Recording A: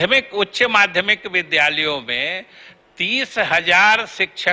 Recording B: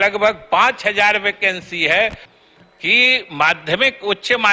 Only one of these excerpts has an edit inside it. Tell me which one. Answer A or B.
B